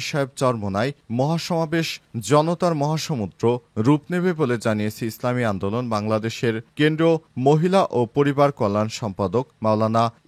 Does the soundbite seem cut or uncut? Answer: uncut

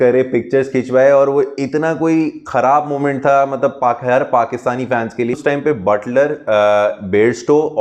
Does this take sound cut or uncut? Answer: cut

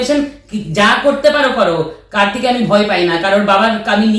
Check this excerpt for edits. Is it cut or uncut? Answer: uncut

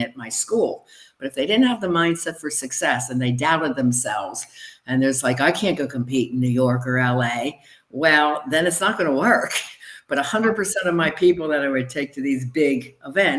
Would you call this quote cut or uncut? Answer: uncut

